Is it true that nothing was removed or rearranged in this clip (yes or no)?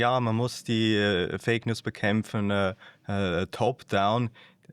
yes